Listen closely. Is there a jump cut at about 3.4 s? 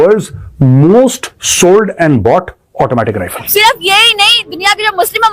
yes; 1 cut; at 3.4 s

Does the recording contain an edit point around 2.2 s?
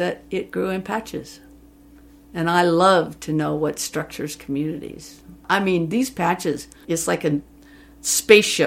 no; 2 cuts; at 5.4 s, 6.8 s

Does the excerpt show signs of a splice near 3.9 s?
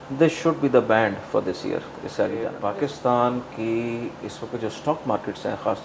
no; 1 cut; at 2.6 s

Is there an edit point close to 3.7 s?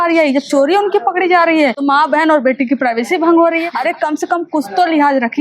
yes; 2 cuts; at 1.8 s, 3.7 s

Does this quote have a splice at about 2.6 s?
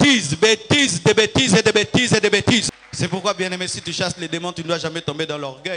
yes; 1 cut; at 2.6 s

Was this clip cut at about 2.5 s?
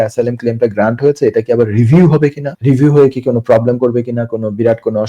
yes; 1 cut; at 2.5 s

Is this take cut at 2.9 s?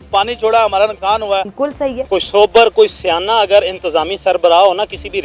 no; 1 cut; at 1.6 s

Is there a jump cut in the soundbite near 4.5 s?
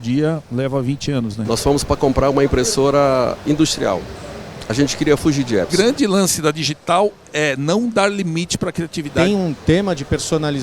no; 3 cuts; at 1.4 s, 5.7 s, 9.1 s

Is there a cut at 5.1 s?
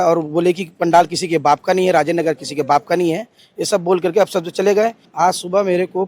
yes; 1 cut; at 5.1 s

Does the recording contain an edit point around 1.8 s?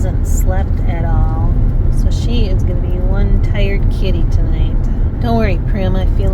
yes; 2 cuts; at 1.8 s, 5.1 s

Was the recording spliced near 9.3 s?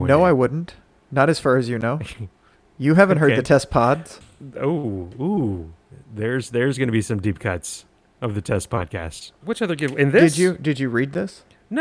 yes; 1 cut; at 9.3 s

